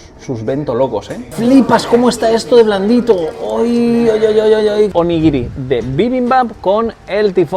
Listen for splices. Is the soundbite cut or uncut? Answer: cut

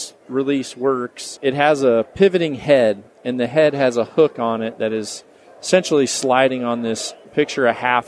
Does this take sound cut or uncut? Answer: cut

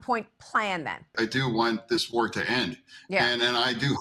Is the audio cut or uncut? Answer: cut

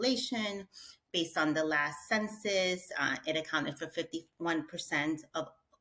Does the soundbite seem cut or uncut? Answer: uncut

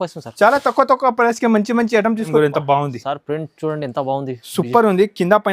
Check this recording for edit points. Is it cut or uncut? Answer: cut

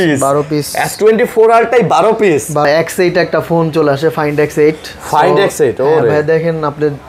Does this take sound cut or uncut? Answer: cut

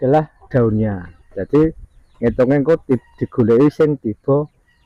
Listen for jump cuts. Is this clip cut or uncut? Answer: uncut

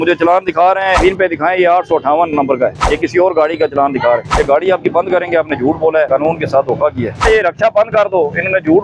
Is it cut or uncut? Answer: cut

